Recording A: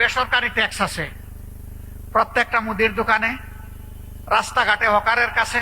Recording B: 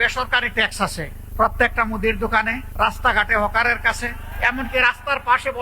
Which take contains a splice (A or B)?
B